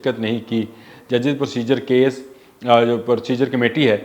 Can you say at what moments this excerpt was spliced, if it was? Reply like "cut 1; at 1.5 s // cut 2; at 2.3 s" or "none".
none